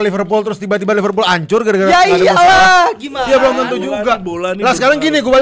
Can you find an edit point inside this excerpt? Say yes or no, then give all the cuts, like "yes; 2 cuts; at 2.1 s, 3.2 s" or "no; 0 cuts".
no; 0 cuts